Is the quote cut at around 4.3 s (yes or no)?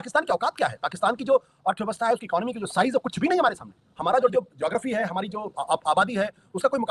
yes